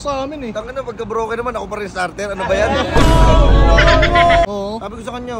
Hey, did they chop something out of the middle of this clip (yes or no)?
yes